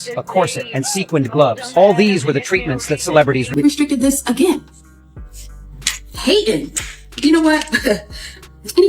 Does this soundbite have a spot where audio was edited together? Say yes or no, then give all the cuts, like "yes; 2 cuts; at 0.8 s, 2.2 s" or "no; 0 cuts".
yes; 1 cut; at 3.5 s